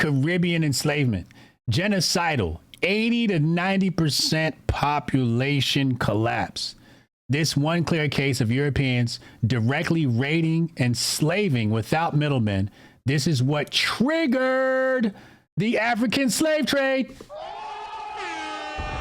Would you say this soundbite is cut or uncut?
uncut